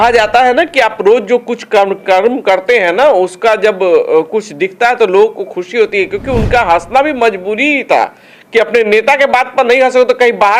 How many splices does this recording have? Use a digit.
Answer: 0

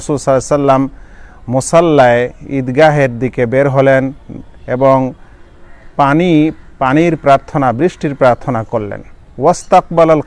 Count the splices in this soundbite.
0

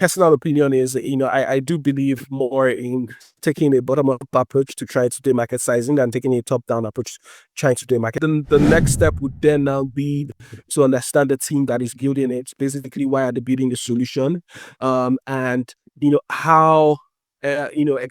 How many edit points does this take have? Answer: 1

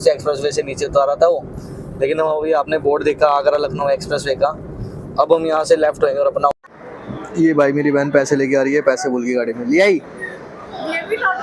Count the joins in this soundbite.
1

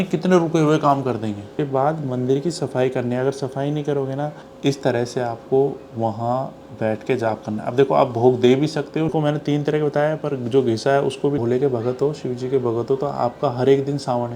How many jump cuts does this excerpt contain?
4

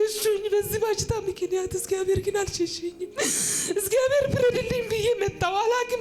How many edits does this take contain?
0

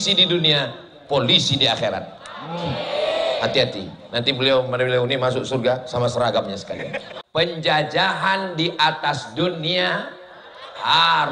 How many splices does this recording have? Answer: 1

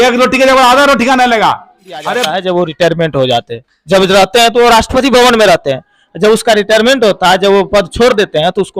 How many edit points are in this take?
1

